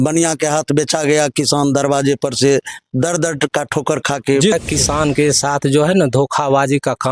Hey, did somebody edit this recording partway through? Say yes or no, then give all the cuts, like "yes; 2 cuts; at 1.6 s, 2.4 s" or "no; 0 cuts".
yes; 1 cut; at 4.5 s